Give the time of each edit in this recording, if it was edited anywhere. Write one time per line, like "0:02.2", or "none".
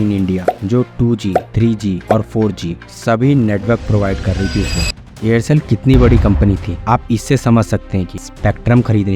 0:04.9
0:08.2